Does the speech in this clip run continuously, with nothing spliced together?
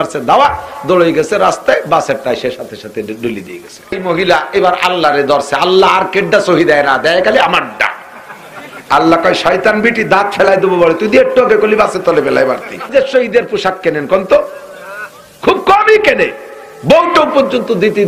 no; 2 cuts; at 4.0 s, 12.8 s

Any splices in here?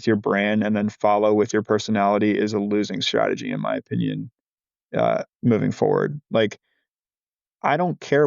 no; 0 cuts

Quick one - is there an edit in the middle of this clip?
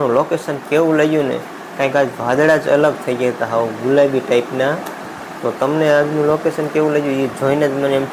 no; 0 cuts

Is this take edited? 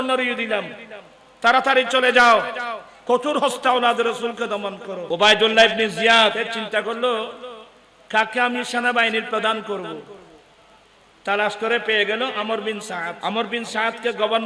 yes; 3 cuts; at 4.9 s, 6.5 s, 13.1 s

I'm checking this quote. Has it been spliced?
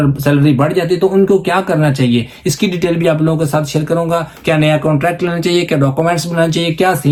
no; 0 cuts

